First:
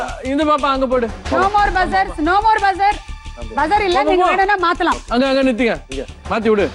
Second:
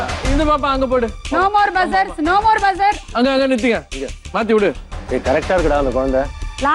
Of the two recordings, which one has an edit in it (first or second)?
second